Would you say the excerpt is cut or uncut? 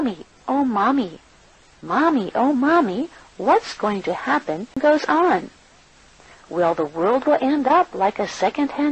cut